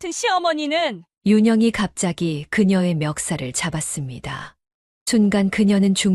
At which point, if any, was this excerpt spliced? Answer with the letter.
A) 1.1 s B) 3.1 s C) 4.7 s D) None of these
D